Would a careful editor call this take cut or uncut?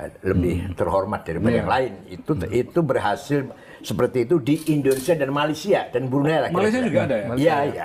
uncut